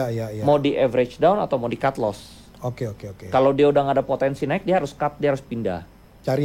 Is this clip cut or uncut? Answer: uncut